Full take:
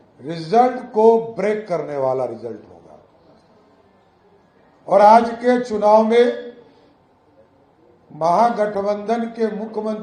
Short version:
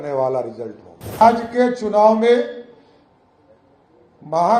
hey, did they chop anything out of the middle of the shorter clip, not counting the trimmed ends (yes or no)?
yes